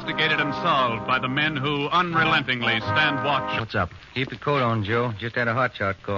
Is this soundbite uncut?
yes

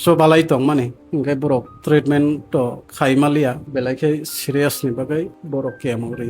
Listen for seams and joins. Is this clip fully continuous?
no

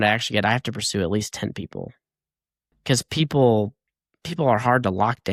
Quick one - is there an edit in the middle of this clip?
no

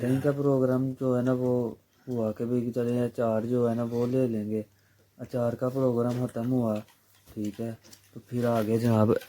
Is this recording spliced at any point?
no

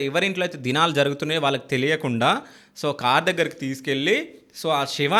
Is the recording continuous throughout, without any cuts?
yes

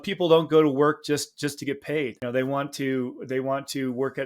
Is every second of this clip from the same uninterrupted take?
no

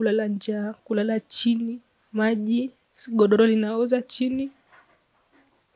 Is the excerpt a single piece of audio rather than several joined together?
yes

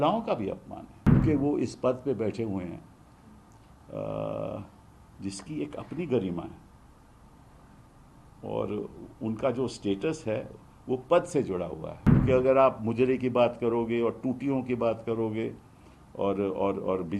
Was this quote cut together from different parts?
yes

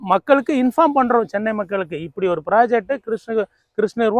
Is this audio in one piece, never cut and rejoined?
yes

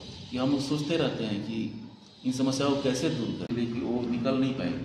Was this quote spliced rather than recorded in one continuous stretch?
yes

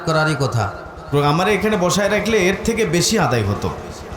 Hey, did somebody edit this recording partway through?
yes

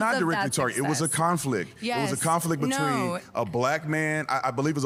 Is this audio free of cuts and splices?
yes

